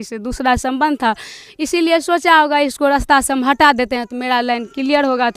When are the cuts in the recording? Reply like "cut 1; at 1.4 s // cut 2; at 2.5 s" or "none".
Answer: none